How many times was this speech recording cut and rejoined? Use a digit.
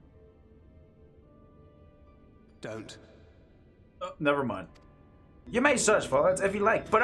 1